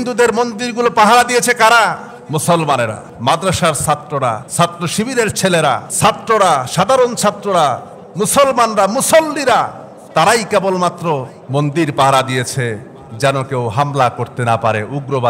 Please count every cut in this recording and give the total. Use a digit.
5